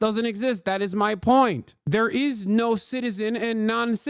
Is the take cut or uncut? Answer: cut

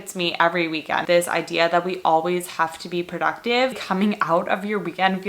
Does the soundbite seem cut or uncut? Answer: cut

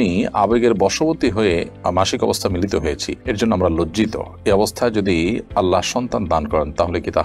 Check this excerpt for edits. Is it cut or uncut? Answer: uncut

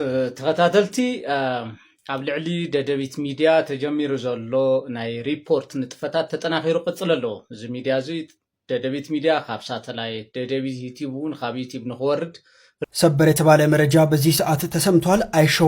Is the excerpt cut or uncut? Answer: cut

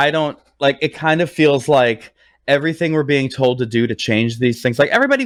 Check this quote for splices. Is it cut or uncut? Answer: uncut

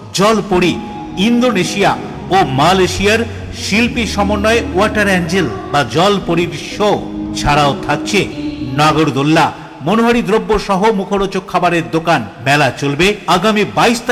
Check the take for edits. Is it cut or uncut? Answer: uncut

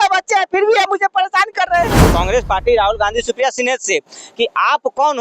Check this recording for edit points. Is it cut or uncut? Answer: cut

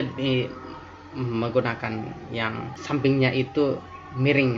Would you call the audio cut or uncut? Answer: cut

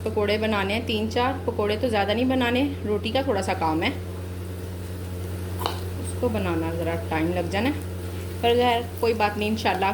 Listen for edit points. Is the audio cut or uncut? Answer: uncut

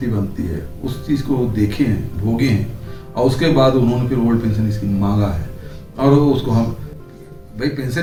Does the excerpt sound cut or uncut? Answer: uncut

